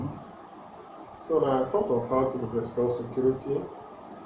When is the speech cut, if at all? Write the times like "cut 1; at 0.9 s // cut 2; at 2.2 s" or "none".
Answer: none